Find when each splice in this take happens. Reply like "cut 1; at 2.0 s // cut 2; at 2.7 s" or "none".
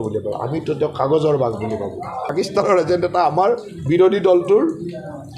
cut 1; at 2.3 s